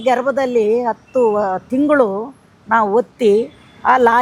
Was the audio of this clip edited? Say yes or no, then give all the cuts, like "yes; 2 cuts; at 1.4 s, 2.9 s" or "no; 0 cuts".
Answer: no; 0 cuts